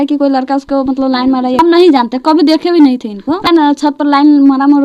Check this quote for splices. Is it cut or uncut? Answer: cut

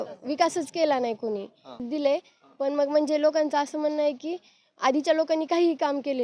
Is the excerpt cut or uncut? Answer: cut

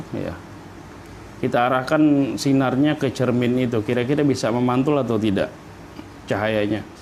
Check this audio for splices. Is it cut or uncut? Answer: uncut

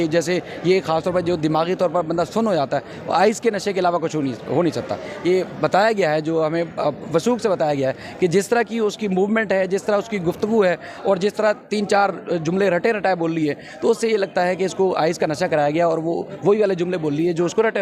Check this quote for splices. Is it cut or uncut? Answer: uncut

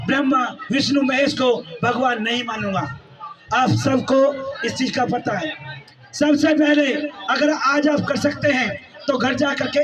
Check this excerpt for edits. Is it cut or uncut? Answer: uncut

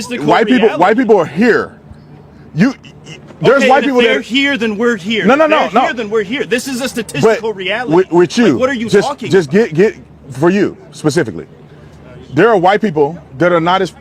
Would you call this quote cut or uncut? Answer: uncut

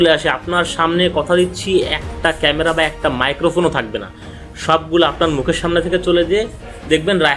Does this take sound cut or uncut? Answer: uncut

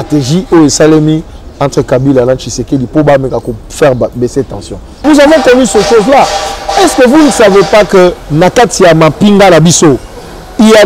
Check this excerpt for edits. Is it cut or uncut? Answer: cut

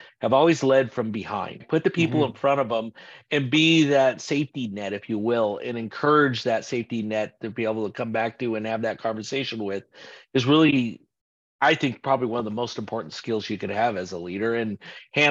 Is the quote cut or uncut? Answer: cut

